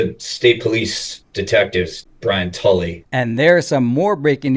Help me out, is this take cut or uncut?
cut